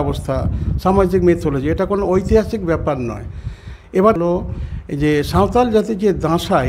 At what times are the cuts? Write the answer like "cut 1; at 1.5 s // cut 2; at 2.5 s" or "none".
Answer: cut 1; at 4.2 s